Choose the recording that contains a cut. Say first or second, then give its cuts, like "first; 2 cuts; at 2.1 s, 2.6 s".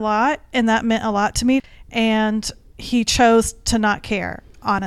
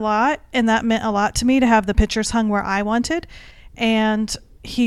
first; 1 cut; at 1.6 s